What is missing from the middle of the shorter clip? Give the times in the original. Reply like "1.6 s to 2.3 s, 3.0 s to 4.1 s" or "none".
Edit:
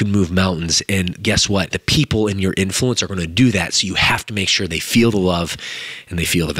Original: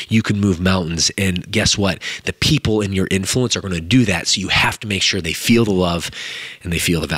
2.0 s to 2.3 s